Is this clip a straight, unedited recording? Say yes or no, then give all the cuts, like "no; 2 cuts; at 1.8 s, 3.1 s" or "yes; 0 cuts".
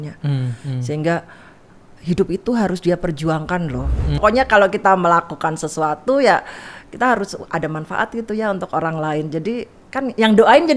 no; 1 cut; at 4.2 s